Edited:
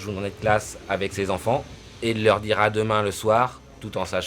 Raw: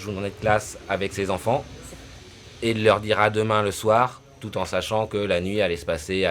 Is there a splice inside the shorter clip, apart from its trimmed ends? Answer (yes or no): yes